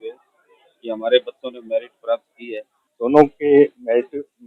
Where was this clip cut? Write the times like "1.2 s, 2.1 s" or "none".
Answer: 2.9 s